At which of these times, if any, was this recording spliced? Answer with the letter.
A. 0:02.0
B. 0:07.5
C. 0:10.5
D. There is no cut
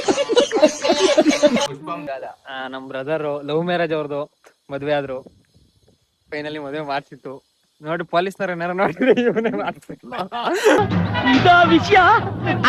A